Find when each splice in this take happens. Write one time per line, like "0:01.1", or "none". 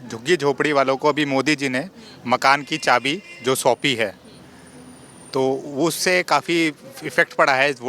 none